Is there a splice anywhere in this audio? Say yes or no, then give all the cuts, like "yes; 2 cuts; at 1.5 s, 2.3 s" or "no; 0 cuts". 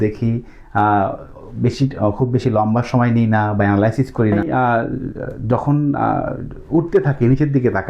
yes; 1 cut; at 4.4 s